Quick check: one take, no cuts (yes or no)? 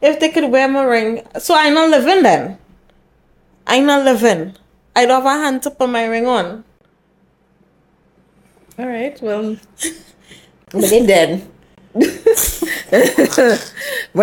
yes